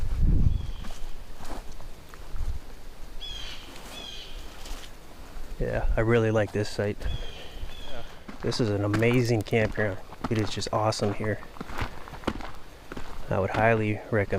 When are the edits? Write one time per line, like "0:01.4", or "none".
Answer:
0:08.2